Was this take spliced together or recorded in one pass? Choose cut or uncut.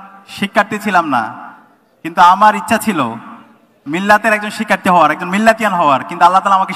uncut